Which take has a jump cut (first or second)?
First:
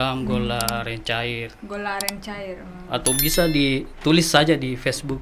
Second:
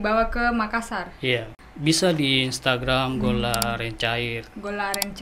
second